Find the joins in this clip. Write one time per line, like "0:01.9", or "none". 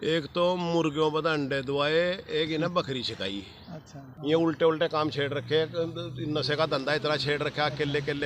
0:04.1